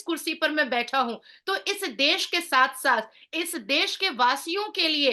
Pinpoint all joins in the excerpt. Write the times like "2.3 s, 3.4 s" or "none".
none